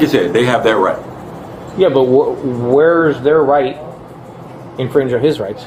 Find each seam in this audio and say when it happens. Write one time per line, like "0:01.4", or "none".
none